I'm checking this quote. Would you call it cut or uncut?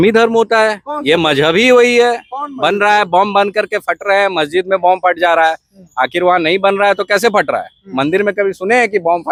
uncut